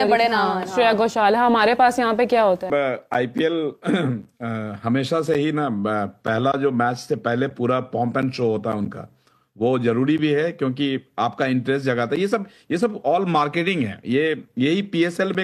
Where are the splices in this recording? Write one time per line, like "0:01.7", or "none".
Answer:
0:02.6

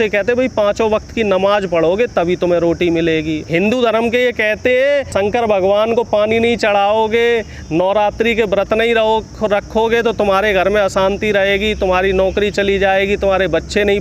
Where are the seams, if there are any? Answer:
0:03.4
0:05.1

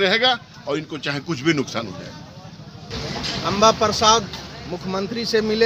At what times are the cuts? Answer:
0:02.9

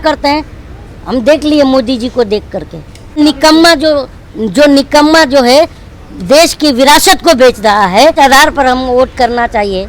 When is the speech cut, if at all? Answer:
0:03.2
0:08.1

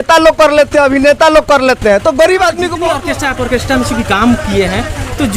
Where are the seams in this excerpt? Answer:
0:02.9

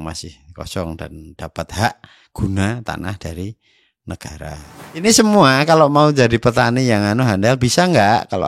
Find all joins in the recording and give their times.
0:04.7

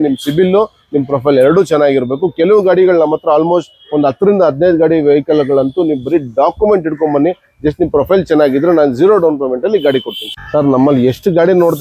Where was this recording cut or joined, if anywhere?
none

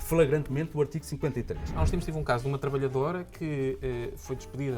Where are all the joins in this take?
0:01.8

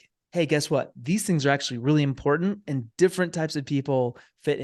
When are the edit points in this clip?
none

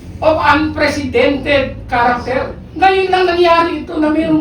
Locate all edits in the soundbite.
0:02.6

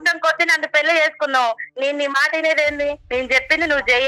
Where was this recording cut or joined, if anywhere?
0:01.6
0:03.0

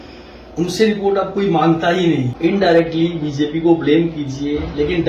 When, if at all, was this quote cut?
0:02.3

